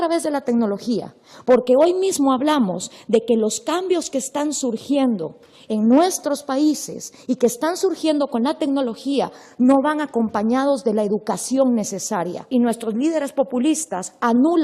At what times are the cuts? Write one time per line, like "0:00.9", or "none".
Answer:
0:09.4